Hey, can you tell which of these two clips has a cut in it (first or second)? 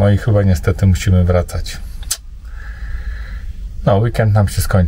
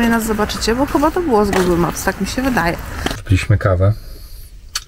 second